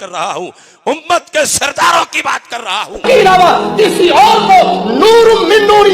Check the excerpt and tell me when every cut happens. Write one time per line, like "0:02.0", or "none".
0:03.0